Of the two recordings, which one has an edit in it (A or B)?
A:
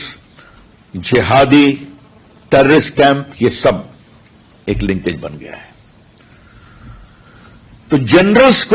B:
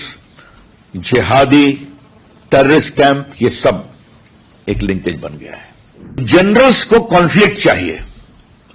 B